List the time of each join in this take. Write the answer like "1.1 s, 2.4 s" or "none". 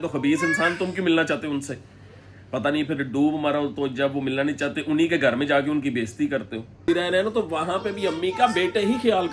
6.9 s